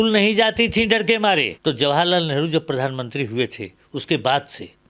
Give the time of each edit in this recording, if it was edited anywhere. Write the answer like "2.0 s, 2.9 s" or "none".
1.5 s

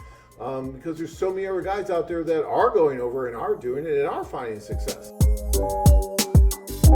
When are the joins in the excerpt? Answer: 5.1 s

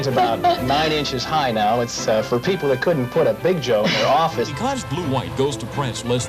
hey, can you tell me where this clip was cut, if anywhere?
4.5 s

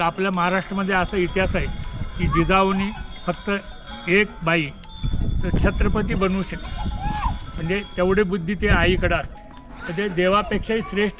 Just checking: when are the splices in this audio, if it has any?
none

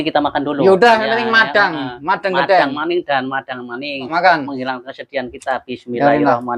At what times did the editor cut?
4.1 s

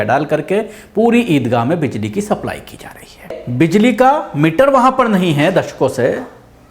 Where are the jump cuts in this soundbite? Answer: 3.4 s

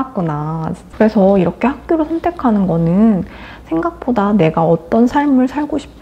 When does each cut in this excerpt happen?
0.9 s

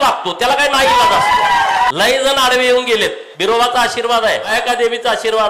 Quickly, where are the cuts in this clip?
1.9 s, 3.3 s, 4.5 s

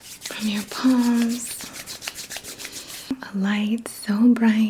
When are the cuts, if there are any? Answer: 3.3 s

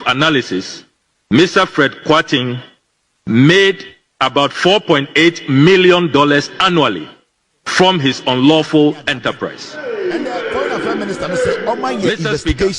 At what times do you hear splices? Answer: 11.6 s

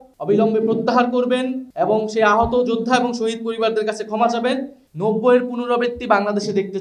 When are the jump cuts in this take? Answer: 4.8 s

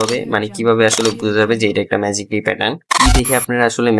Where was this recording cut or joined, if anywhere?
2.9 s

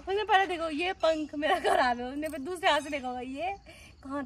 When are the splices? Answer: none

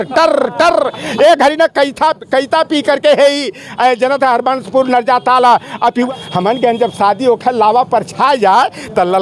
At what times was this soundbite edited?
6.1 s

